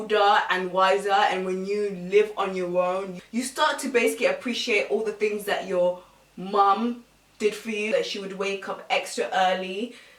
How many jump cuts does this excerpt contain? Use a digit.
1